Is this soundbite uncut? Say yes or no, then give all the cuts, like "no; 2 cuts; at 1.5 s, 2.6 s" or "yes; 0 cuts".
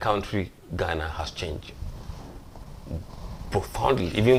yes; 0 cuts